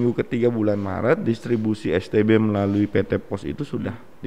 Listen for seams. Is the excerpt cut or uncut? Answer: uncut